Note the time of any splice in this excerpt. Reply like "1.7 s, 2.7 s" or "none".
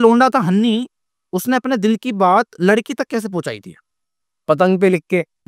none